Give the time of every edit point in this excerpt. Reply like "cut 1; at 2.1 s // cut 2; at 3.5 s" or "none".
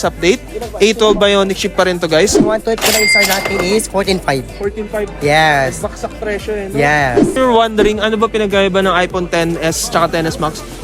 cut 1; at 2.4 s // cut 2; at 7.4 s